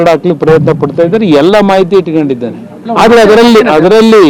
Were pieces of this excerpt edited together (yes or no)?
no